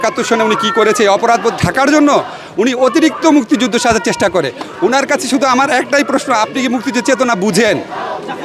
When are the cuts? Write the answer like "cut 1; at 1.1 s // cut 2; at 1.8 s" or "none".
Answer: none